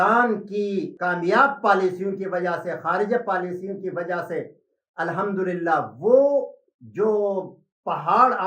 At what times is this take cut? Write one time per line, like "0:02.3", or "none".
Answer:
0:00.9